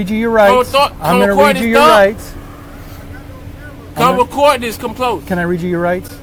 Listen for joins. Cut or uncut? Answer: uncut